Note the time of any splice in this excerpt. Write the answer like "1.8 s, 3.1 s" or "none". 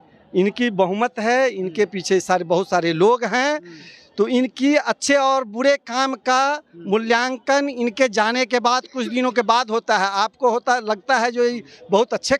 none